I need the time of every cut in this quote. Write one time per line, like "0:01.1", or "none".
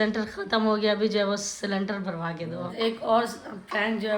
0:02.7